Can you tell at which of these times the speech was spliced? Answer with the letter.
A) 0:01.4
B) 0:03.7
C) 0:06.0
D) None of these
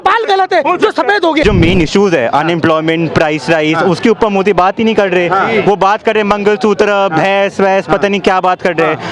A